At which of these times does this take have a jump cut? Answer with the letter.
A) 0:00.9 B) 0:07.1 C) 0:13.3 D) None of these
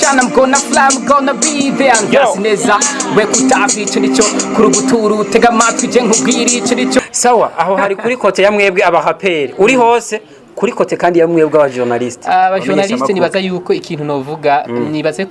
B